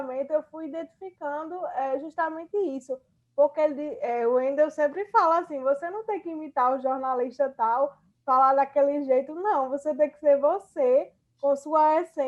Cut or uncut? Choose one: uncut